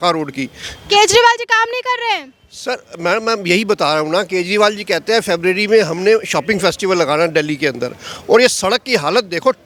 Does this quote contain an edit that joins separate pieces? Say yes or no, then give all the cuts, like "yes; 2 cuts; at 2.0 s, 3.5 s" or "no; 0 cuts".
no; 0 cuts